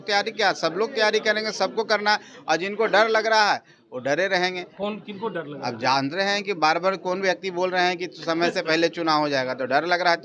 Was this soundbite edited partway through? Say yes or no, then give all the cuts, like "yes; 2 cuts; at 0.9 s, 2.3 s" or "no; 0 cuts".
no; 0 cuts